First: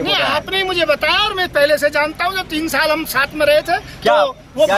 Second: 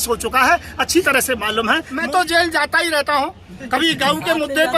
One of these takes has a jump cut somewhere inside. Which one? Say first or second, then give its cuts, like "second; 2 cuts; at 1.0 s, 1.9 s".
second; 1 cut; at 1.9 s